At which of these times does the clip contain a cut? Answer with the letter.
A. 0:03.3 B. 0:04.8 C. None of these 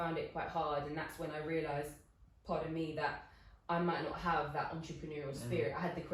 C